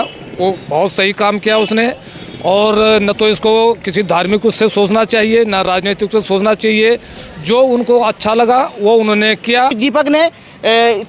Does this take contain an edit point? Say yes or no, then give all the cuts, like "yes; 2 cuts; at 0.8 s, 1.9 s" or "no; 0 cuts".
yes; 1 cut; at 9.8 s